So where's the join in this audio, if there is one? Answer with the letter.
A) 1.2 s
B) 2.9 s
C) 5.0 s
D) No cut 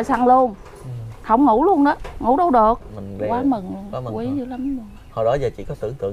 B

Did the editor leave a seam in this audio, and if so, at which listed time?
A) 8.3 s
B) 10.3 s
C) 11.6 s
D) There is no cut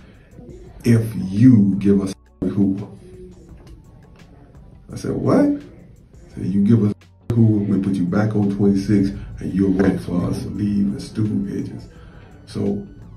B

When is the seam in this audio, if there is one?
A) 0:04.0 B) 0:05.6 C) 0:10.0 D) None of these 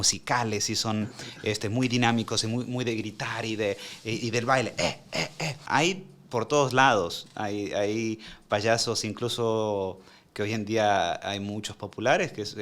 B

